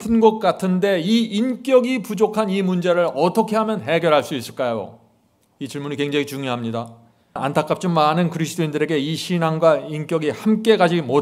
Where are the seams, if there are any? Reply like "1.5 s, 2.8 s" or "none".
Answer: 7.4 s